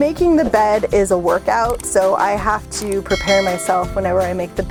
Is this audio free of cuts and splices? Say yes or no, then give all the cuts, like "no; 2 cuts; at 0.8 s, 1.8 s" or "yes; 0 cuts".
yes; 0 cuts